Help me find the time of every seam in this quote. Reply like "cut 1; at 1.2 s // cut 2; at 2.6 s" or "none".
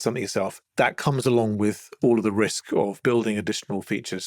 none